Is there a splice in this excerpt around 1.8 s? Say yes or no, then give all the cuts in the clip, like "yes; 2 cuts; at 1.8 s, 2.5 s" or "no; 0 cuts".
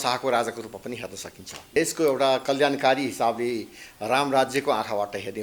yes; 1 cut; at 1.8 s